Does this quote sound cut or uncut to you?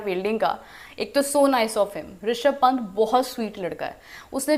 uncut